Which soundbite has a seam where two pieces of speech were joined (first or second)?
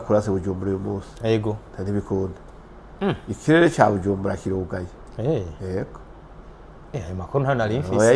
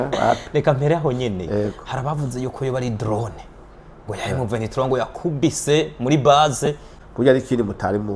second